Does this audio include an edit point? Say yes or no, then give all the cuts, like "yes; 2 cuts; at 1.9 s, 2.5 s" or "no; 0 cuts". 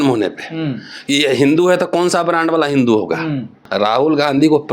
yes; 1 cut; at 3.6 s